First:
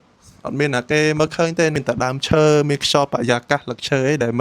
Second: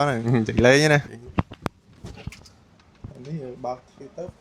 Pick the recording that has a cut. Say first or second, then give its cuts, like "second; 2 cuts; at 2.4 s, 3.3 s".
second; 1 cut; at 1.1 s